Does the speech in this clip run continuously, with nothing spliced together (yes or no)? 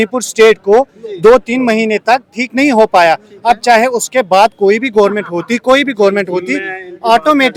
yes